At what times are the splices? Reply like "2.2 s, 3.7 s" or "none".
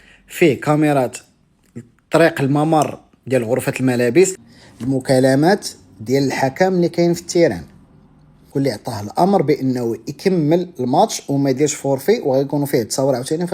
4.4 s, 8.4 s